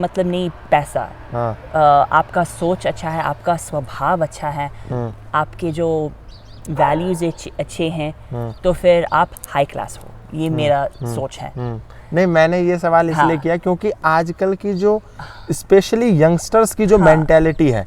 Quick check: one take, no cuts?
yes; 0 cuts

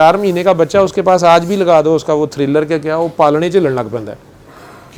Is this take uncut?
yes; 0 cuts

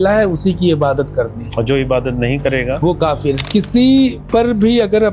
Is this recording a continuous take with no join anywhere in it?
no; 2 cuts; at 3.4 s, 4.2 s

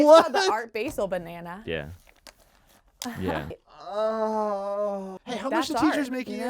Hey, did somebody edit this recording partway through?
yes; 2 cuts; at 3.5 s, 5.1 s

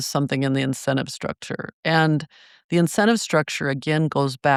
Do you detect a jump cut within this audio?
no; 0 cuts

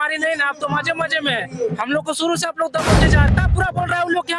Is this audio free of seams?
no; 1 cut; at 3.3 s

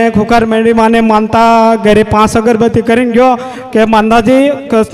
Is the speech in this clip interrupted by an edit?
no; 0 cuts

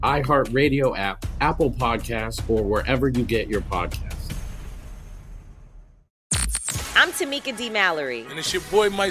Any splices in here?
yes; 1 cut; at 6.0 s

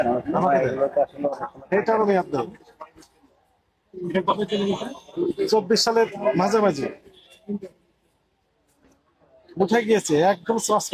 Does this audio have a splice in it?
no; 0 cuts

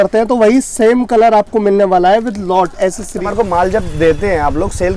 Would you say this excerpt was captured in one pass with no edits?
no; 1 cut; at 3.2 s

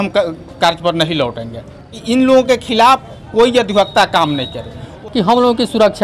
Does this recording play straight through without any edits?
no; 2 cuts; at 1.9 s, 4.9 s

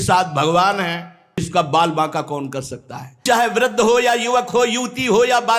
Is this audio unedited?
no; 2 cuts; at 1.5 s, 3.2 s

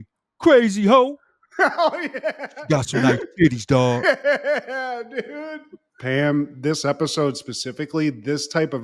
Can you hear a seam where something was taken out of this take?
yes; 1 cut; at 5.9 s

